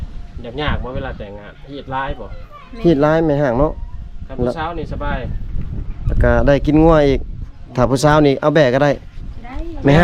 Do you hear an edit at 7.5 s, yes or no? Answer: no